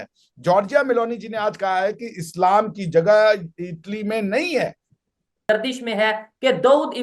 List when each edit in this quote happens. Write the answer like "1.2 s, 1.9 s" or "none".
5.4 s